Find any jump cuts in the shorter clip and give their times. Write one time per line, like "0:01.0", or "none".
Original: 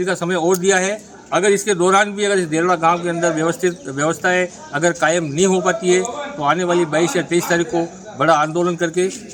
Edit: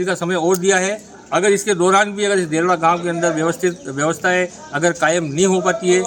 none